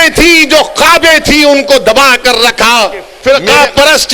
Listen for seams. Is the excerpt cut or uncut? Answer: cut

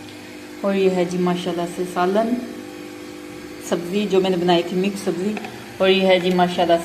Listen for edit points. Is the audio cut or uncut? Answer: uncut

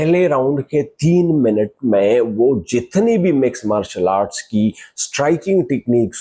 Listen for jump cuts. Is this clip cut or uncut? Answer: uncut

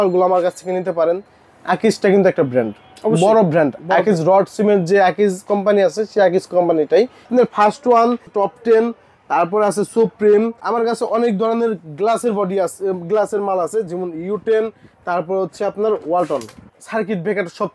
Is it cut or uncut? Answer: cut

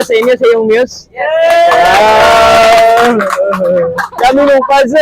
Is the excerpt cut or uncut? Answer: cut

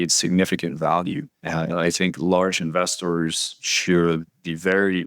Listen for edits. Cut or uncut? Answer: cut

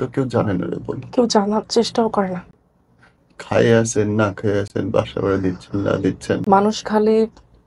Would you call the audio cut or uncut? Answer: uncut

